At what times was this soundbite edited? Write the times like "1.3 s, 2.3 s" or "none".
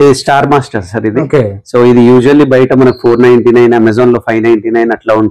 none